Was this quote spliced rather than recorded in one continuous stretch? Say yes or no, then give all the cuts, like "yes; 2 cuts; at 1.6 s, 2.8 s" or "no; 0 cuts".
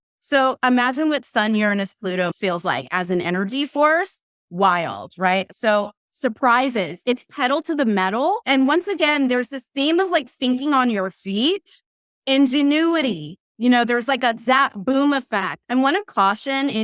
yes; 5 cuts; at 2.3 s, 5.5 s, 7.0 s, 8.4 s, 15.5 s